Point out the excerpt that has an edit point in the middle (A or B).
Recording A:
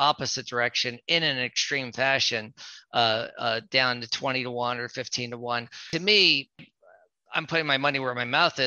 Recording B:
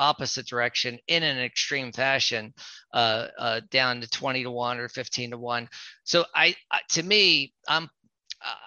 A